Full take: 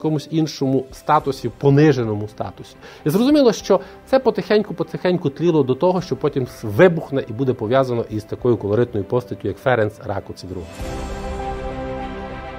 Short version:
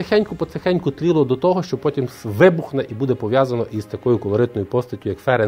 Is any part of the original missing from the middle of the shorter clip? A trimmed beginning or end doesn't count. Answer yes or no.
no